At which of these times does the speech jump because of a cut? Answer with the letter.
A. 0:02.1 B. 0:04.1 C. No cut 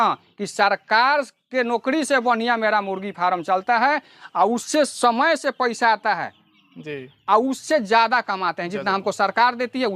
C